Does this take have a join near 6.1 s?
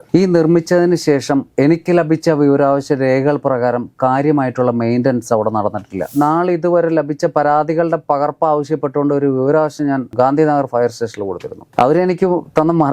yes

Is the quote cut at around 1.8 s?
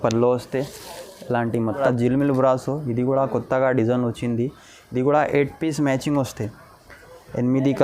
yes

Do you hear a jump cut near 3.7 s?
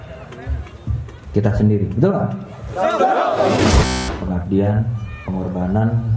yes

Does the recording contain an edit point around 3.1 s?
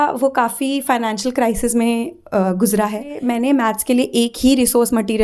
yes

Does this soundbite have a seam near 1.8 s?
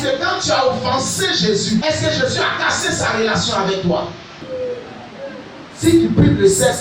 yes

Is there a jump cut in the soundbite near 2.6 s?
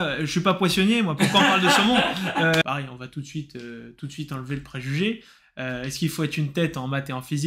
yes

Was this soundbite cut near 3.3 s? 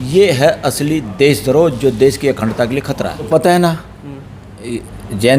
yes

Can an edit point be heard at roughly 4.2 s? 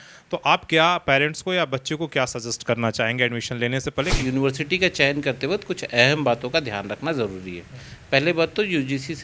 yes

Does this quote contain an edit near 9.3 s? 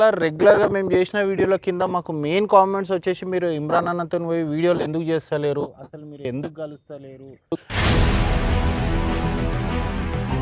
no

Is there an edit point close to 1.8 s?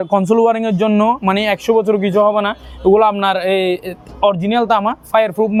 no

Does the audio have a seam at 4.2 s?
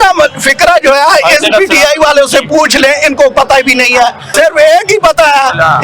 yes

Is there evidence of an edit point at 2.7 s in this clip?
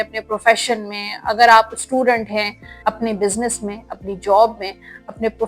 yes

